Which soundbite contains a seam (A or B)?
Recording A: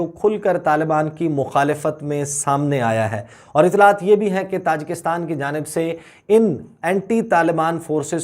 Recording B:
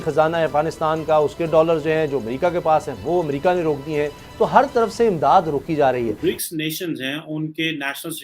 B